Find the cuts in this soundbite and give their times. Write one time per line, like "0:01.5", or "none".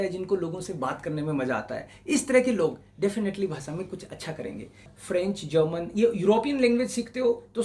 0:04.9